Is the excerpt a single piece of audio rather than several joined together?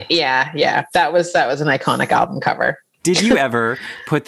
no; 1 cut; at 2.9 s

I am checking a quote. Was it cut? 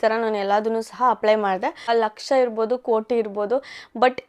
yes; 1 cut; at 1.9 s

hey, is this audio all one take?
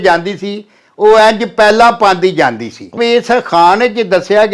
no; 1 cut; at 3.0 s

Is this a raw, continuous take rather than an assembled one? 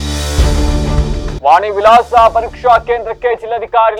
yes; 0 cuts

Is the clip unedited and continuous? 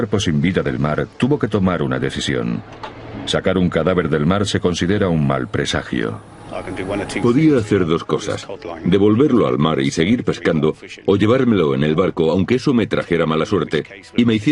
yes; 0 cuts

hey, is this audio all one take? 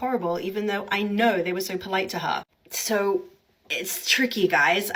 yes; 0 cuts

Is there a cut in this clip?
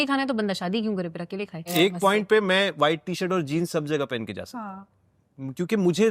yes; 1 cut; at 1.6 s

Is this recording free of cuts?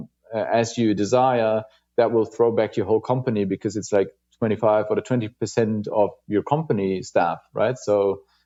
yes; 0 cuts

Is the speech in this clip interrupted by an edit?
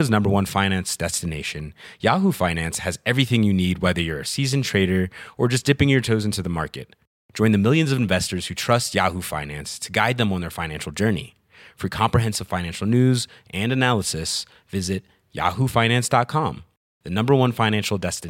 no; 0 cuts

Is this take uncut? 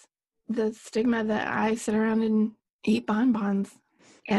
no; 1 cut; at 2.7 s

